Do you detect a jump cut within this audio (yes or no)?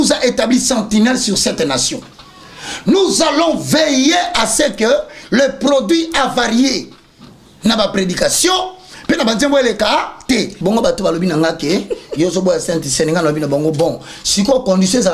yes